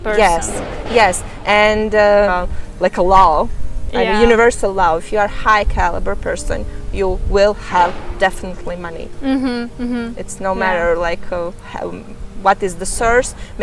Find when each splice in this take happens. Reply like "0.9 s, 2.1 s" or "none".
none